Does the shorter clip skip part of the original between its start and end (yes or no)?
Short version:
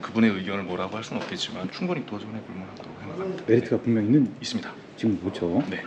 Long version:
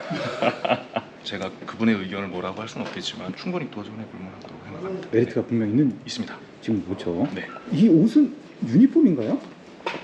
no